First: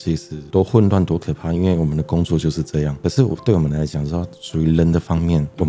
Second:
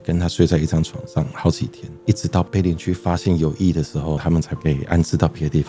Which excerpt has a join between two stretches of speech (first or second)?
second